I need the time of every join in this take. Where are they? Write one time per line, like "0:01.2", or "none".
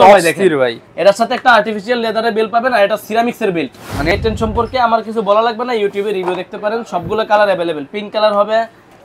0:04.1